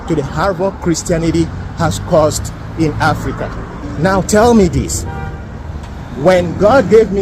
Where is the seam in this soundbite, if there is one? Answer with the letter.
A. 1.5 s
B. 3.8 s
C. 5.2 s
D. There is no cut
B